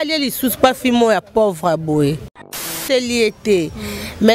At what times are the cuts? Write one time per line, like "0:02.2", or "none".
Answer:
0:02.5